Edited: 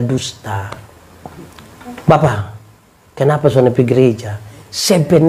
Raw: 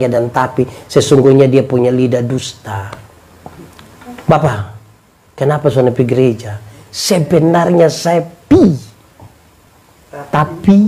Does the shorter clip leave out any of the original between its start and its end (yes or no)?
no